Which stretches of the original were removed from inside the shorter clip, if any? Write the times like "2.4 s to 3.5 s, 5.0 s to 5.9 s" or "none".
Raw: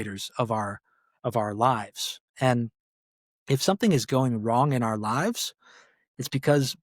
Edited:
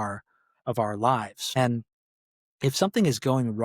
1.9 s to 2.2 s